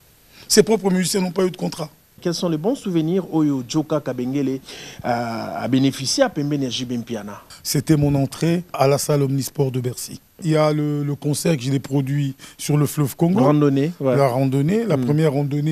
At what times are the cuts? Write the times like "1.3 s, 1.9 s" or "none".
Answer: 2.2 s, 7.5 s, 8.8 s, 10.4 s